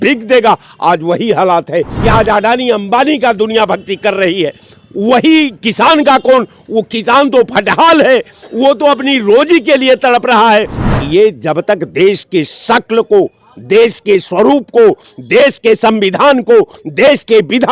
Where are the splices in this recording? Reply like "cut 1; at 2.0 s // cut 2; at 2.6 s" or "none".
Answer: cut 1; at 1.9 s // cut 2; at 10.8 s